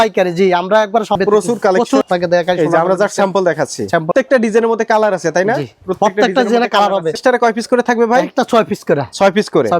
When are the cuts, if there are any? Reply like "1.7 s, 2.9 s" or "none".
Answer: 1.2 s, 4.1 s, 7.2 s